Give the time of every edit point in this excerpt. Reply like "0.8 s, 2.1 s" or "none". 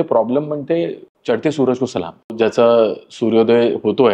1.1 s, 2.3 s